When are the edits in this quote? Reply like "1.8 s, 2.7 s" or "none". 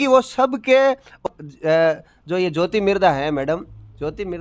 1.2 s